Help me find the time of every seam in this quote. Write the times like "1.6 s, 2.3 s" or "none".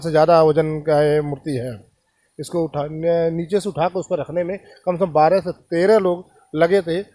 none